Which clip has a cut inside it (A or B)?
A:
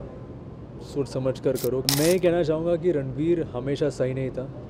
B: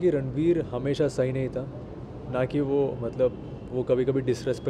A